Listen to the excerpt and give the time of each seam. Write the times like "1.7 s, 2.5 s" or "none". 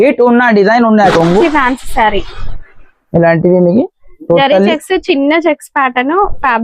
1.1 s